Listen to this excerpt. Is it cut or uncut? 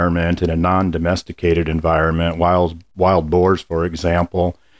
uncut